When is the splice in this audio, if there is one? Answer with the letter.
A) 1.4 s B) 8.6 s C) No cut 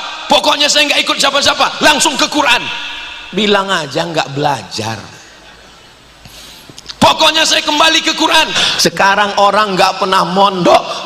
B